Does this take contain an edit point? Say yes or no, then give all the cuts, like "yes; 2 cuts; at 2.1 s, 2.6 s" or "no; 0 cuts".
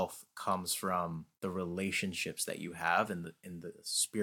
yes; 1 cut; at 1.3 s